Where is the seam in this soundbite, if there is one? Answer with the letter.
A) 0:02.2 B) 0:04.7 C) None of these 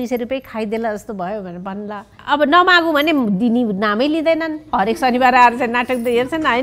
A